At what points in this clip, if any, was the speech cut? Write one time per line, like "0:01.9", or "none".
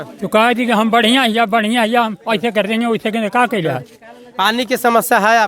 none